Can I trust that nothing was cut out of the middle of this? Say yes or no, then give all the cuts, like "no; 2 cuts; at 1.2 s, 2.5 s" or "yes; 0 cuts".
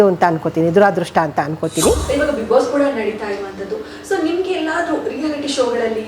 no; 1 cut; at 2.0 s